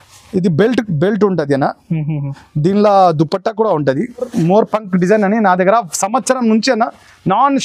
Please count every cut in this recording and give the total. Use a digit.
1